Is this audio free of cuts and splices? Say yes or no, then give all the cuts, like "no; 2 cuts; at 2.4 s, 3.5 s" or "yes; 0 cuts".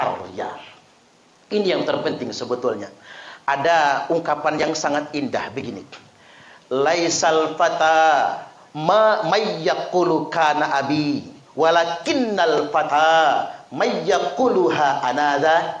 yes; 0 cuts